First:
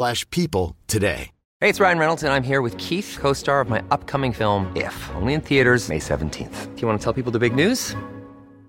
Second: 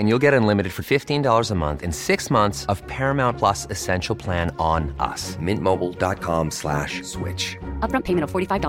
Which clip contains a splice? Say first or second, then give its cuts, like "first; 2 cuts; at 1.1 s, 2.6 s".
first; 1 cut; at 1.4 s